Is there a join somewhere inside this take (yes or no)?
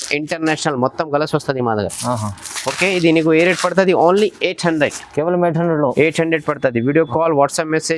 no